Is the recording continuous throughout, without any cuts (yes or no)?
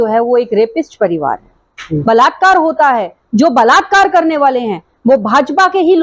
no